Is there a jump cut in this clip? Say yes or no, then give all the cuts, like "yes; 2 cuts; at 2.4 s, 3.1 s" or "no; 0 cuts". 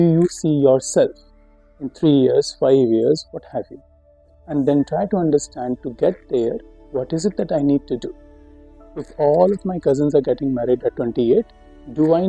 no; 0 cuts